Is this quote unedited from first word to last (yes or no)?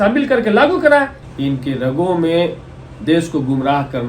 no